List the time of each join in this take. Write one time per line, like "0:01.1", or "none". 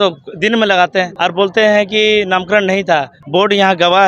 0:01.1
0:03.2